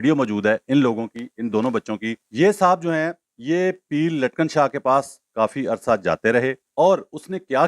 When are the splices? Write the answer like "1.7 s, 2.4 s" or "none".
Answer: 2.2 s, 6.6 s